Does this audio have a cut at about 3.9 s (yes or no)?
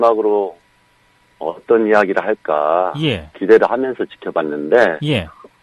yes